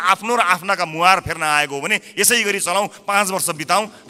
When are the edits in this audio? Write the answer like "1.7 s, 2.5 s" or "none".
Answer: none